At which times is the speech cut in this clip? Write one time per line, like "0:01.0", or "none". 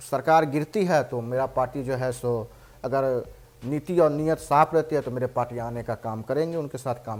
none